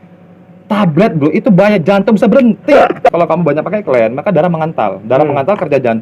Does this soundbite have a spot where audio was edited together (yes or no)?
yes